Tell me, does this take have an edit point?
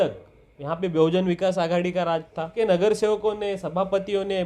yes; 1 cut; at 2.5 s

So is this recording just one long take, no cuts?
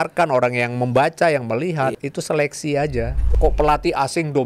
no; 2 cuts; at 2.0 s, 3.3 s

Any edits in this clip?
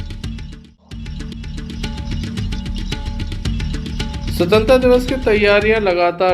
yes; 1 cut; at 1.2 s

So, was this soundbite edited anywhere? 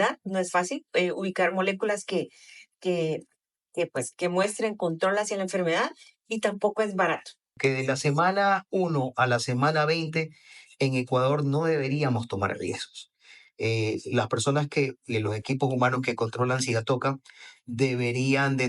yes; 1 cut; at 7.6 s

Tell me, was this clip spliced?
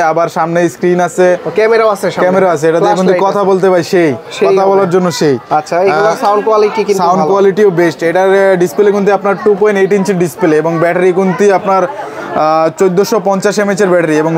no; 0 cuts

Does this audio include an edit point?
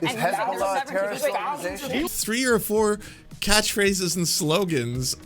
yes; 1 cut; at 2.1 s

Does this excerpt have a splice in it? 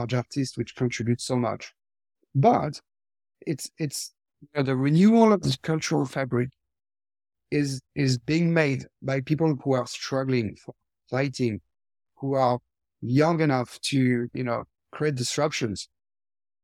no; 0 cuts

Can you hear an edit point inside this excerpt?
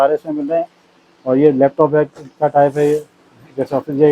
no; 0 cuts

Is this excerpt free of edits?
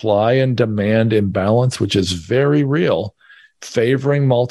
yes; 0 cuts

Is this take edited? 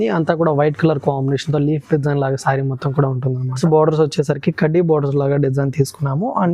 yes; 1 cut; at 3.6 s

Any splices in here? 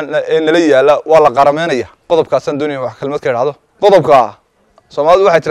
yes; 2 cuts; at 1.9 s, 3.7 s

